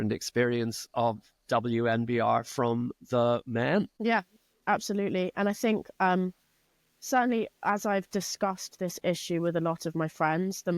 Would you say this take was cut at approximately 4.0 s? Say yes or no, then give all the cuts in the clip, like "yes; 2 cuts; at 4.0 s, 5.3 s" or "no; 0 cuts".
no; 0 cuts